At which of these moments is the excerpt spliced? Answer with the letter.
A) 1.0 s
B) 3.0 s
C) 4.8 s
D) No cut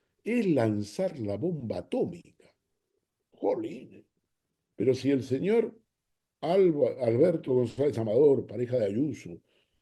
D